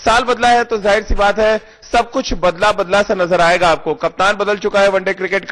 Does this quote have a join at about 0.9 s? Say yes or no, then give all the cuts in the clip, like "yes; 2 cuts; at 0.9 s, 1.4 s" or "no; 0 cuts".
yes; 1 cut; at 0.9 s